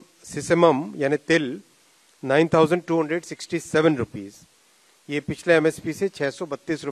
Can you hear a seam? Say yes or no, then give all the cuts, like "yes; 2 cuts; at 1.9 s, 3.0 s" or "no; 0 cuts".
no; 0 cuts